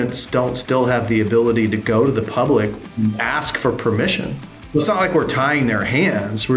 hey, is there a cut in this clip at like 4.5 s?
yes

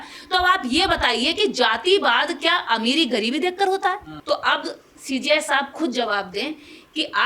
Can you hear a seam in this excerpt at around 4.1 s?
yes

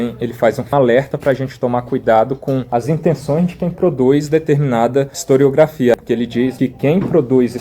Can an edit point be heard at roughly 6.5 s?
yes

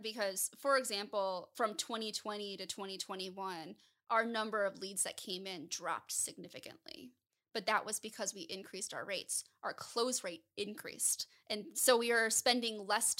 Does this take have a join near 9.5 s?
no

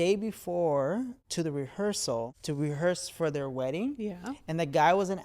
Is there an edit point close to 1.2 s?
yes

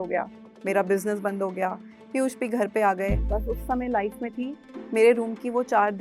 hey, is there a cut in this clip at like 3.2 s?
yes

